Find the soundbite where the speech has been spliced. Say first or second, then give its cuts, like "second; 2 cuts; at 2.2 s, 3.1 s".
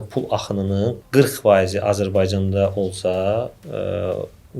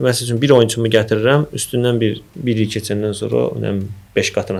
first; 1 cut; at 1.0 s